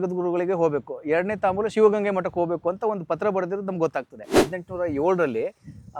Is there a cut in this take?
yes; 1 cut; at 4.5 s

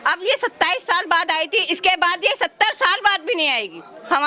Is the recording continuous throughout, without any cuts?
yes; 0 cuts

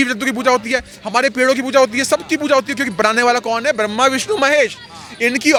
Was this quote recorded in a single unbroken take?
yes; 0 cuts

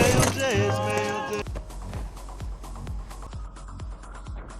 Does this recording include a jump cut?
yes; 1 cut; at 1.4 s

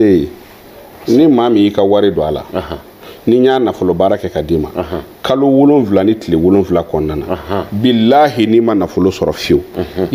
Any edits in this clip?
no; 0 cuts

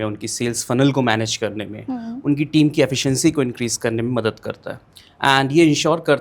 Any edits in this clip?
no; 0 cuts

